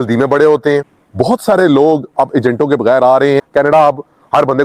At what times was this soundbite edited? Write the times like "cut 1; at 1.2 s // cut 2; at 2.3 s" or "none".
cut 1; at 1.0 s // cut 2; at 3.4 s